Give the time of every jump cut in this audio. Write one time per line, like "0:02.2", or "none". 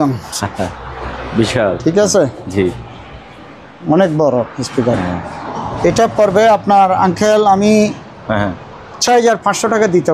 none